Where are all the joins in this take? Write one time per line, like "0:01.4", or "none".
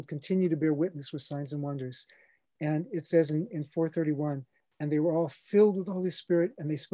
none